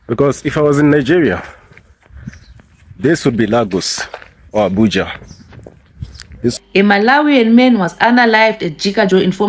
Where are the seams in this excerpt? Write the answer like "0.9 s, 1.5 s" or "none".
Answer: 6.5 s